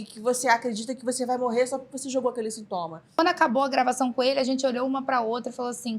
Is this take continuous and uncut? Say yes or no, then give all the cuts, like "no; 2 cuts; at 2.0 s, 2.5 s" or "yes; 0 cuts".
no; 1 cut; at 3.2 s